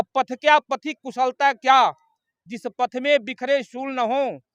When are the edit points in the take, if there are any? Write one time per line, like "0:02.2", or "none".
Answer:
none